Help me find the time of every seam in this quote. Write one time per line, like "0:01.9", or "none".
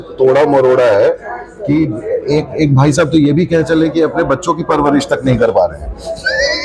none

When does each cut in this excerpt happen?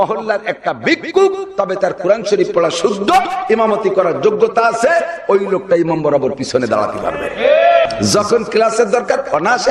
0:07.9

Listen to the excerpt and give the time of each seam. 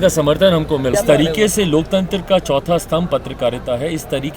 0:00.9

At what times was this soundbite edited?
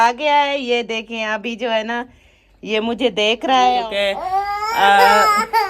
0:03.8

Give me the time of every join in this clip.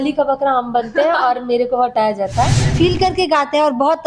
0:02.7

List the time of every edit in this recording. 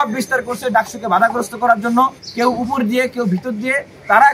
0:02.2

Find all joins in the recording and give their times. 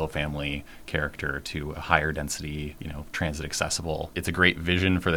0:02.8
0:04.1

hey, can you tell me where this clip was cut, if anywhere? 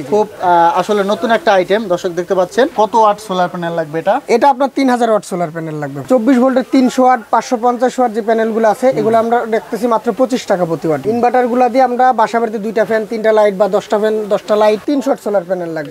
0:02.7
0:06.0
0:11.0
0:14.8

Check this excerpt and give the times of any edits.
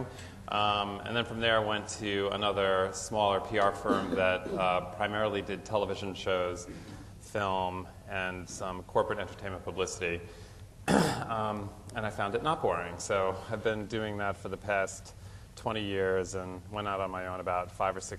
0:03.6

